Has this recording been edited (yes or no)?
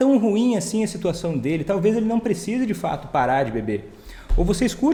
no